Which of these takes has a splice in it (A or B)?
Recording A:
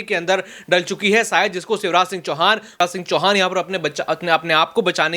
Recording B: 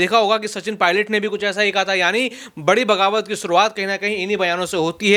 A